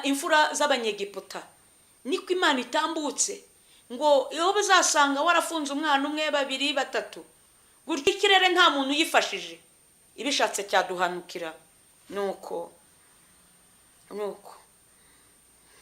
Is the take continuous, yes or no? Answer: no